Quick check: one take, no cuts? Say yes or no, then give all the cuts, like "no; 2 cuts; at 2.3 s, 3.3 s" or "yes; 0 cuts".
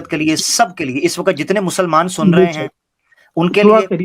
yes; 0 cuts